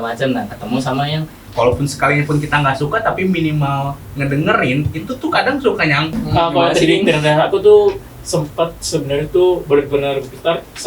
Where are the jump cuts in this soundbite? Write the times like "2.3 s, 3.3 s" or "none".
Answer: 1.3 s, 6.1 s